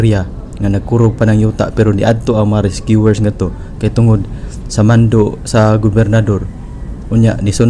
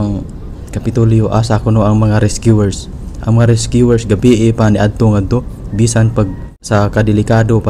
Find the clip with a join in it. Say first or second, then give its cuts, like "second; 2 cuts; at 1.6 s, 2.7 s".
second; 1 cut; at 6.5 s